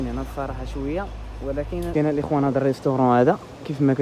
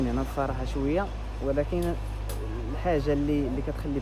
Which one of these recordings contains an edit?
first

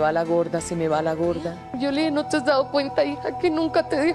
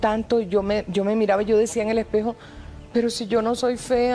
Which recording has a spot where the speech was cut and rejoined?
first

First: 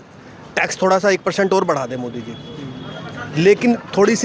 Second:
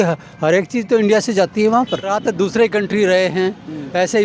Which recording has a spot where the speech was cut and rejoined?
second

